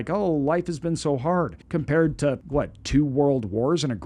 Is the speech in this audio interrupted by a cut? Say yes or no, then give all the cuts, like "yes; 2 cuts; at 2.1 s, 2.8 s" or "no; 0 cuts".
yes; 2 cuts; at 1.6 s, 2.4 s